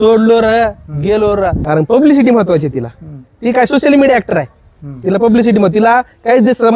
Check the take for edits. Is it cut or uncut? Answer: cut